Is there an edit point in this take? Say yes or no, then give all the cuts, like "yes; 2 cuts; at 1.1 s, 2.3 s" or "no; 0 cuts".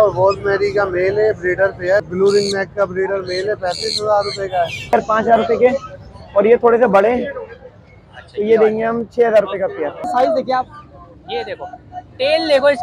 yes; 3 cuts; at 2.1 s, 4.9 s, 10.0 s